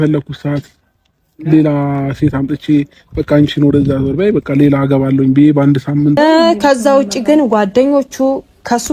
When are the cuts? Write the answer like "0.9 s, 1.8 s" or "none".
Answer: 6.2 s